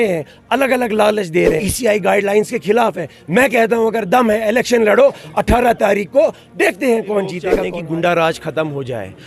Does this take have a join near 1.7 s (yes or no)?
yes